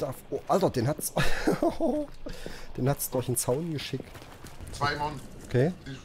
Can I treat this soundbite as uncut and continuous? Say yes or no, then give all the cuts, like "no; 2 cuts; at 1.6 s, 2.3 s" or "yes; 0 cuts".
no; 1 cut; at 4.6 s